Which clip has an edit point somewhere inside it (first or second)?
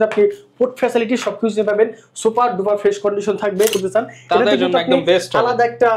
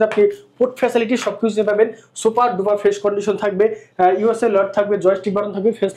first